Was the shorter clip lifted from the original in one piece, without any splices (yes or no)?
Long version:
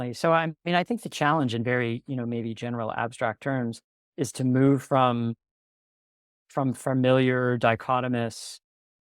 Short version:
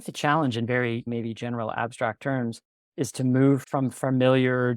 no